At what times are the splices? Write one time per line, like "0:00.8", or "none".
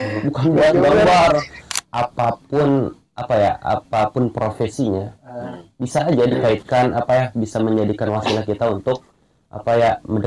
0:01.8

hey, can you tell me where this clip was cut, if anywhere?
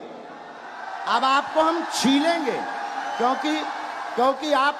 none

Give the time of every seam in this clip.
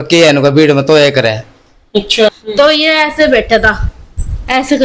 0:02.3

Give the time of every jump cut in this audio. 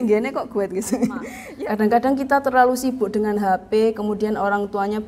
0:01.4

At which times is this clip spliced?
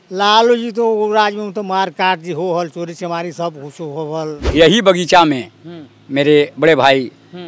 0:04.4

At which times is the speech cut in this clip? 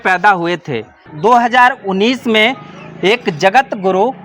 0:01.1

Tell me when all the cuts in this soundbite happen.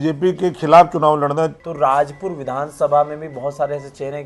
0:01.6

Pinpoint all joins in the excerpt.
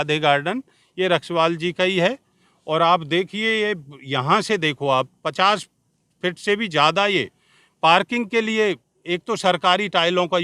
none

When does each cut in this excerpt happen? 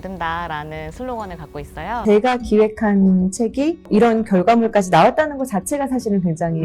0:01.9
0:03.8

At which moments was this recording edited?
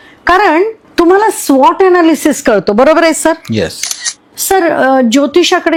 none

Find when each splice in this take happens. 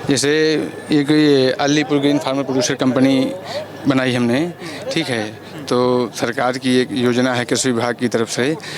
none

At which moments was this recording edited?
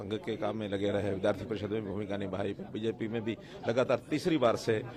none

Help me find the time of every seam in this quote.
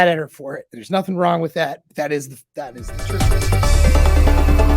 0:02.9

